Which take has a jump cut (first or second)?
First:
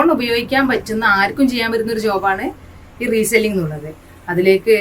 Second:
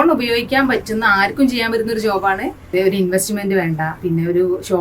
second